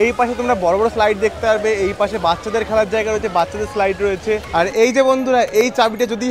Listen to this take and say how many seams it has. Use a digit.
1